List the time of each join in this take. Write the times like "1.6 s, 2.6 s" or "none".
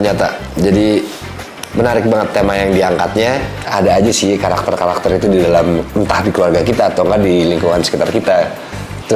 3.7 s